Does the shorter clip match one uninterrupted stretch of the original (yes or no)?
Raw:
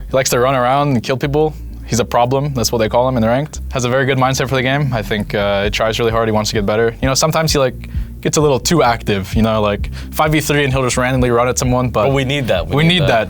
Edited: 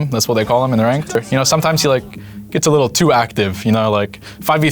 no